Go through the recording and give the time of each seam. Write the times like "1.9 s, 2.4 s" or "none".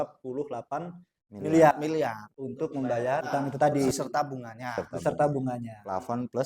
3.2 s, 3.9 s